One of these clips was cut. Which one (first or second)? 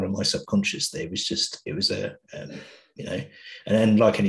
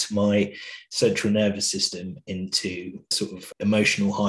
second